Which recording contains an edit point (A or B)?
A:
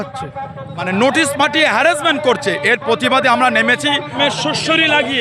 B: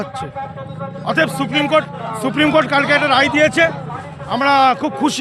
A